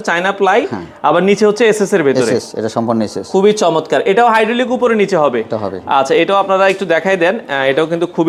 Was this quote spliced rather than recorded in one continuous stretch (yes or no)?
no